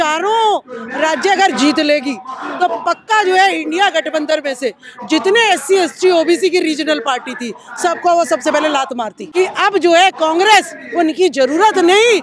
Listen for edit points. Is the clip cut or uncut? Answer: cut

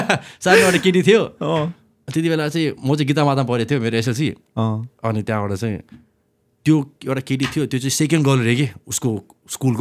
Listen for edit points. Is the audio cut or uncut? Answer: uncut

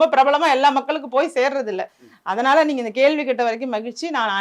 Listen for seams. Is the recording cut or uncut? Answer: uncut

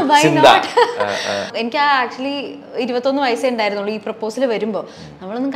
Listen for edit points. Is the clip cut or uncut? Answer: cut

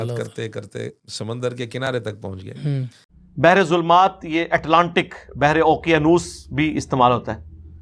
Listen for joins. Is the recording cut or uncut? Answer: cut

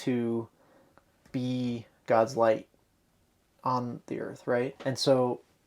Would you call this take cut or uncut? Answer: cut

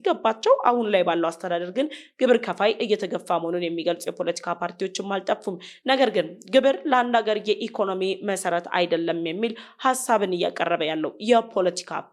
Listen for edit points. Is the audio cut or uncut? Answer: uncut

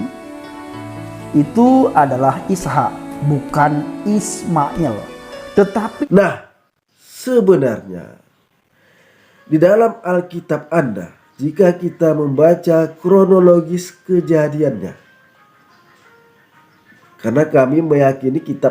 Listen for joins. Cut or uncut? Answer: cut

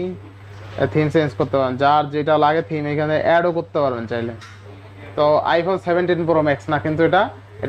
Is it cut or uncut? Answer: uncut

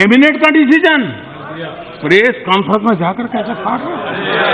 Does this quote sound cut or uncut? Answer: uncut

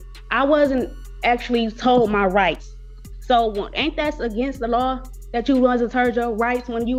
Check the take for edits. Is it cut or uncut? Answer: uncut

